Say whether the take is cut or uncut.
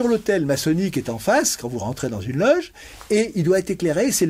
uncut